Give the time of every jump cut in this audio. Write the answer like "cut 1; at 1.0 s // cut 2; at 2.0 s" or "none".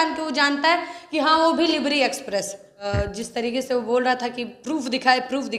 cut 1; at 2.8 s